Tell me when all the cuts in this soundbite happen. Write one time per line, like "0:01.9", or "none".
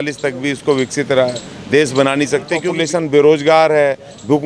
0:02.7

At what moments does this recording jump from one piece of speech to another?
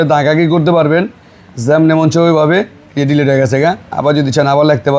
none

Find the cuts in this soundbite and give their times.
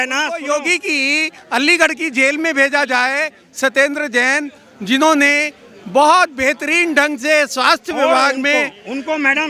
none

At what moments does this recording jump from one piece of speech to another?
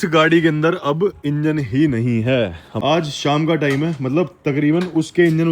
0:02.6

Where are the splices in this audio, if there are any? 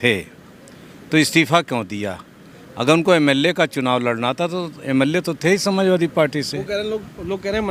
none

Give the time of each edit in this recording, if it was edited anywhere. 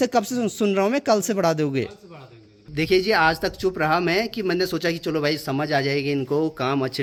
none

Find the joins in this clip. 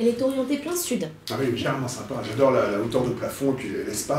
0:01.2

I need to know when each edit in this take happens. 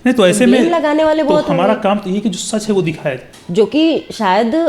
0:03.3

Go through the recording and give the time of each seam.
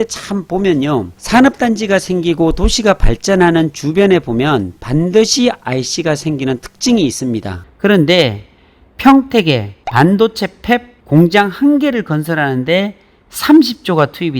0:07.5

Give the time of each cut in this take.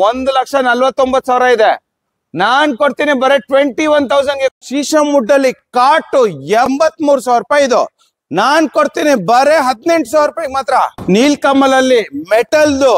0:04.5
0:06.7
0:11.0

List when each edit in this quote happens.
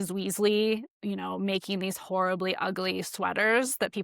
0:00.9

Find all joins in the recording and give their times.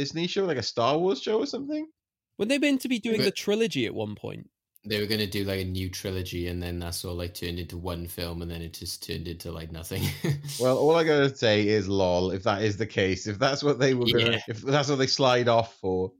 0:14.5

